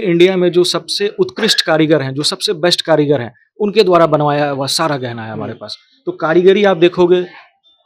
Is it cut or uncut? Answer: uncut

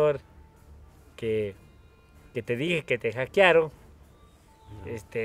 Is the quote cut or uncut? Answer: uncut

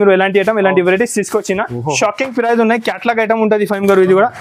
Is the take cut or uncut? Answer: uncut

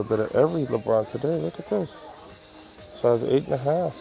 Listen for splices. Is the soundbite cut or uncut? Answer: uncut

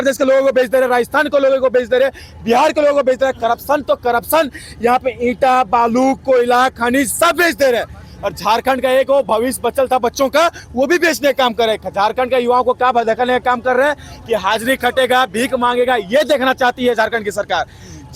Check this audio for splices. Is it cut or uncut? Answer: uncut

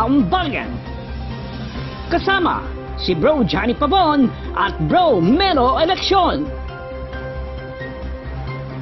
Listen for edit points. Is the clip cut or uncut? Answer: uncut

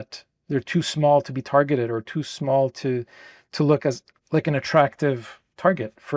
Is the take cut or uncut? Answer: uncut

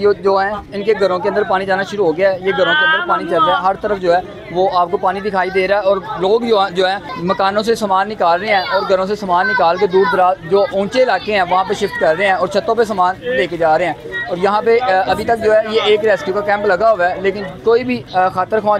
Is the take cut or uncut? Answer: uncut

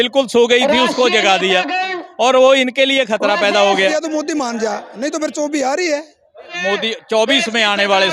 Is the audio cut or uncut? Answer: cut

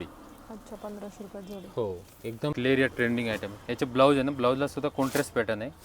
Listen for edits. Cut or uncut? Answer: cut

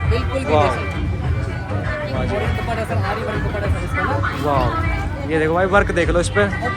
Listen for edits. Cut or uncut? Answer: uncut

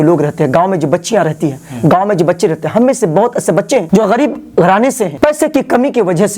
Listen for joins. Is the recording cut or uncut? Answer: uncut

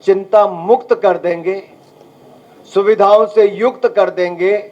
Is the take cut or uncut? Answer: uncut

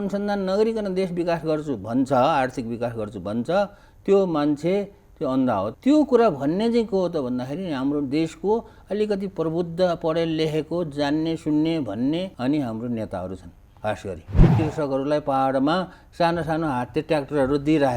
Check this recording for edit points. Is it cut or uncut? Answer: cut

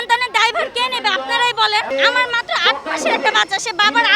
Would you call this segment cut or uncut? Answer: cut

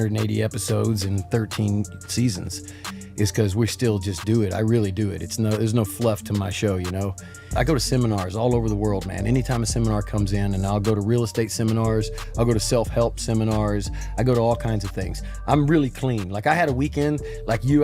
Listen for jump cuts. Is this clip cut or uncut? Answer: uncut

